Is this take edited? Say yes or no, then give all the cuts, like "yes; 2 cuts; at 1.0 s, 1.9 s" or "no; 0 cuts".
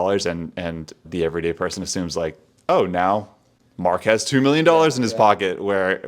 yes; 1 cut; at 1.0 s